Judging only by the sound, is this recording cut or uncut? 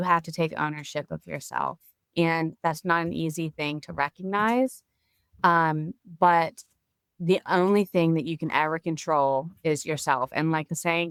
uncut